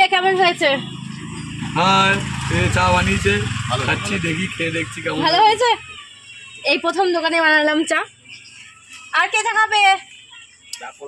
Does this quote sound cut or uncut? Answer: uncut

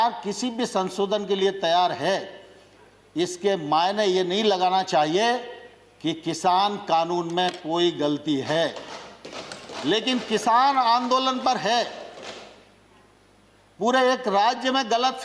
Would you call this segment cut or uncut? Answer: uncut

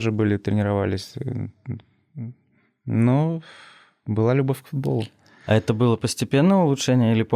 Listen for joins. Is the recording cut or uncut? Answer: uncut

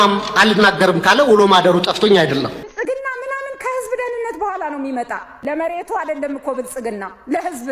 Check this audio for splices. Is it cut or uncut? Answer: cut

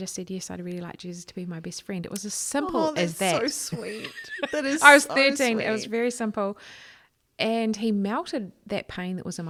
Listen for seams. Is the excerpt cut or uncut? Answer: uncut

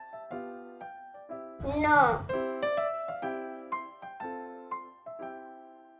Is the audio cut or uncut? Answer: uncut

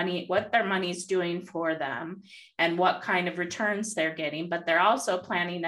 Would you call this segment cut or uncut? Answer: uncut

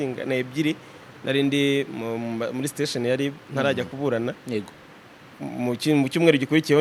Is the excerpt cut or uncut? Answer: uncut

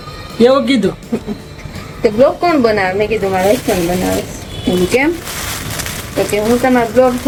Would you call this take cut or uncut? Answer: uncut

